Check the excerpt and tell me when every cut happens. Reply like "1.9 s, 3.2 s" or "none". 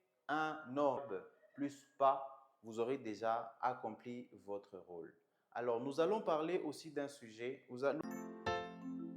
1.0 s, 8.0 s